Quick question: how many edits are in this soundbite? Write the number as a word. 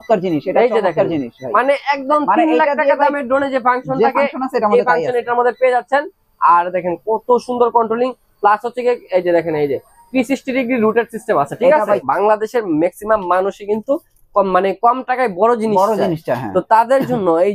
one